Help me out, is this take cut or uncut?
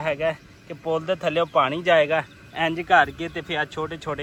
uncut